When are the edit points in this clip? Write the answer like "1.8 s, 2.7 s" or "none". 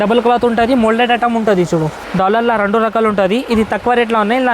2.0 s